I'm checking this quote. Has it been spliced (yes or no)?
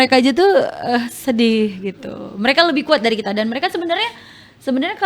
no